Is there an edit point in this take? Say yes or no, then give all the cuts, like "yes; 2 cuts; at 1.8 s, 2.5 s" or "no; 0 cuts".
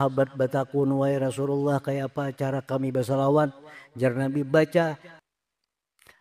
yes; 1 cut; at 5.1 s